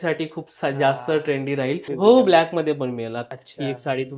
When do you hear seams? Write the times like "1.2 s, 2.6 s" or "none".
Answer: 1.9 s, 3.2 s